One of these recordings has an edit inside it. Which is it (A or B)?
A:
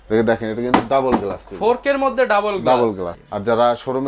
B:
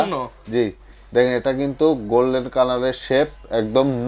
A